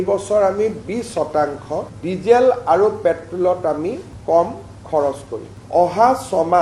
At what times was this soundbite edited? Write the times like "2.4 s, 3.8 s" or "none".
5.5 s